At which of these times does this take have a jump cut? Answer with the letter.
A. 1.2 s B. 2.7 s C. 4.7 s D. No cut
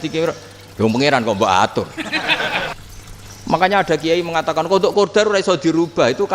B